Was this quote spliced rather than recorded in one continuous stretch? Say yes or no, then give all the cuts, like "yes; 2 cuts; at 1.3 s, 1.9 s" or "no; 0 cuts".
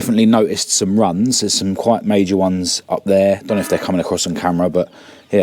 no; 0 cuts